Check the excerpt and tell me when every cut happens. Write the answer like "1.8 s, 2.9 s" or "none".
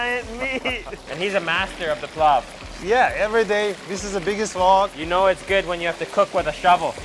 1.0 s, 5.0 s